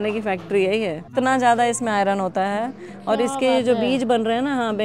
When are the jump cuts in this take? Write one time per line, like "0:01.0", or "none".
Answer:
0:01.1